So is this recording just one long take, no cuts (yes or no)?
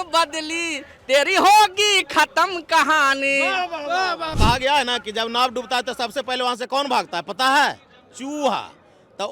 no